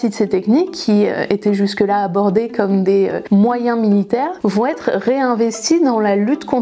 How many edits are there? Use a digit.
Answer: 1